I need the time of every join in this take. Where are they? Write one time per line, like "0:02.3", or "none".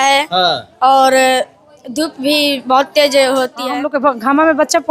0:03.6